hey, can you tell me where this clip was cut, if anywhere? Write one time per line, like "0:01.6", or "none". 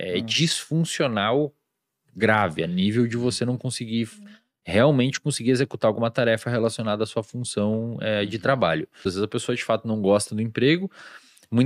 0:09.1